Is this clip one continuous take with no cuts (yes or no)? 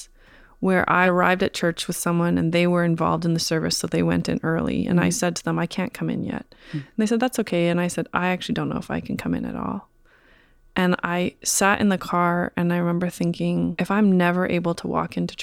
no